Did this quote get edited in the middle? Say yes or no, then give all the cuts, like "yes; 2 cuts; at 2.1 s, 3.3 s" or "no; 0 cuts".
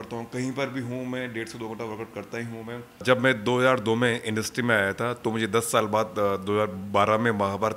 yes; 1 cut; at 2.9 s